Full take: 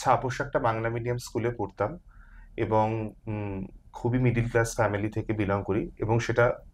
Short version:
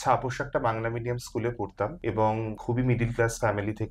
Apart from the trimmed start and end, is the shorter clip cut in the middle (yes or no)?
yes